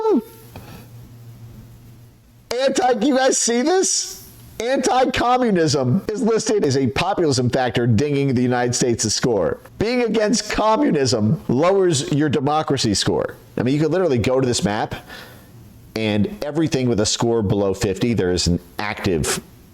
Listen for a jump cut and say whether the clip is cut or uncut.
cut